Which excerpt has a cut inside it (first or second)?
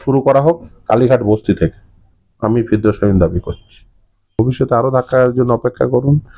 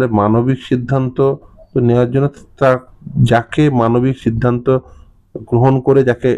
first